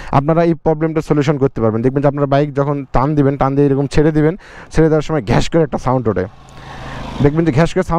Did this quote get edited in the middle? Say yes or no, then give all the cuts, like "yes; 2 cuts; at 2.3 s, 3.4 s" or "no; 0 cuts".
no; 0 cuts